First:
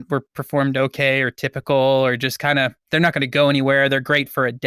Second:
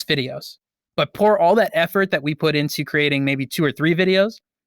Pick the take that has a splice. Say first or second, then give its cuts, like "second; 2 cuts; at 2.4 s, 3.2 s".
second; 1 cut; at 1.1 s